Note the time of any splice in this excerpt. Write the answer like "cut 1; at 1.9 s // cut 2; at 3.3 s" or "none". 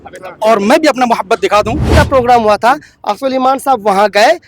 cut 1; at 1.9 s